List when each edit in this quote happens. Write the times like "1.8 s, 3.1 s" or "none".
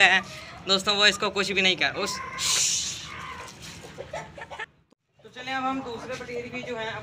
4.6 s

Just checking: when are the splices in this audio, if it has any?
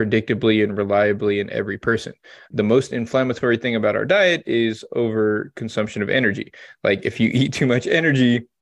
none

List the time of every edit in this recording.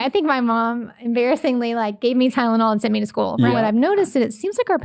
3.5 s

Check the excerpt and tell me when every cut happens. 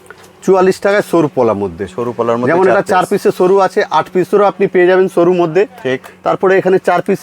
none

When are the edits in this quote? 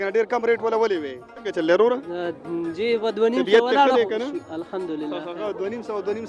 1.2 s

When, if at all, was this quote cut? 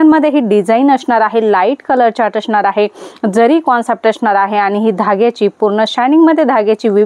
none

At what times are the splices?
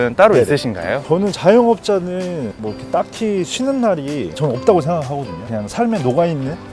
none

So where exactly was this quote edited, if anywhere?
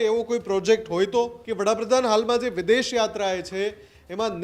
1.4 s

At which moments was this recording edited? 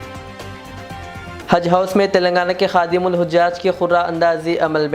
1.4 s

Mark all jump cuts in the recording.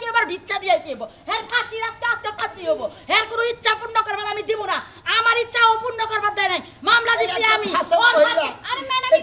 none

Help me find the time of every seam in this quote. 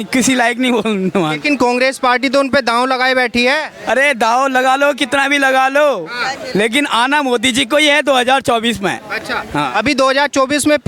none

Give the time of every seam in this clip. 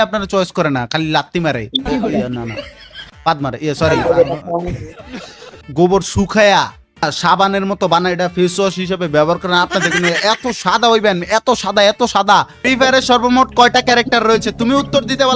5.6 s, 7.0 s, 12.6 s

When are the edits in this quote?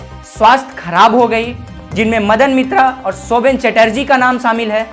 none

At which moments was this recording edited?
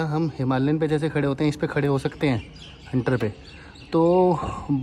none

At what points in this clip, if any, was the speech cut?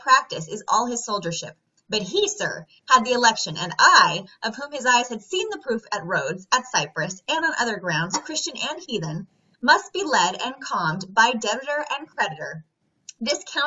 6.6 s

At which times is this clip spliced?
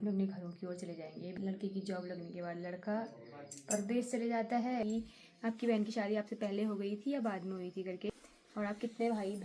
1.3 s, 4.8 s, 8.1 s

